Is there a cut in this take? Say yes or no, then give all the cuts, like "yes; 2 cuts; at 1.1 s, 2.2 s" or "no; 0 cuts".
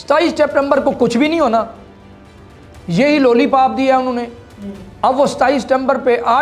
no; 0 cuts